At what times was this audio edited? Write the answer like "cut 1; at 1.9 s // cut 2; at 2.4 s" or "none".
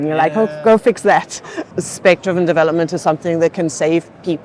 cut 1; at 1.6 s